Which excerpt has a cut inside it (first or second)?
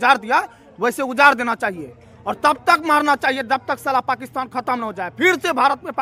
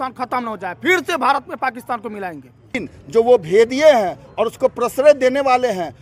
second